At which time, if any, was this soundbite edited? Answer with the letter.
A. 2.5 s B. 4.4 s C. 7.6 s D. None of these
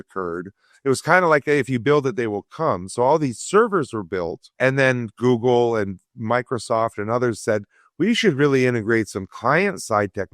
B